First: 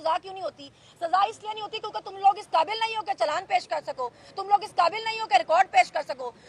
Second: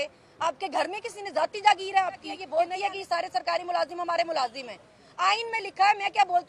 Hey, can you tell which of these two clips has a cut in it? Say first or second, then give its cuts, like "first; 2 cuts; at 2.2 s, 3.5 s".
second; 1 cut; at 2.4 s